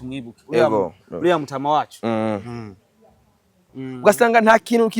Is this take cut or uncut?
cut